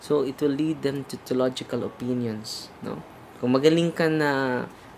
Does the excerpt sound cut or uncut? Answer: uncut